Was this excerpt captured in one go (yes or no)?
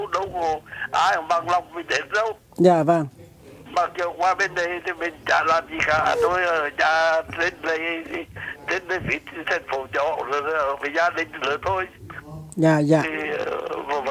no